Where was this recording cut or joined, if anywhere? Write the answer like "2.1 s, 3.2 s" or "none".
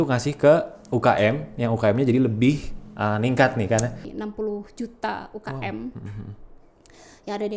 4.0 s